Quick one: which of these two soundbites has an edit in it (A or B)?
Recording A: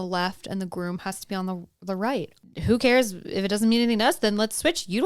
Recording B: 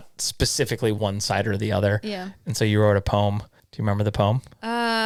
A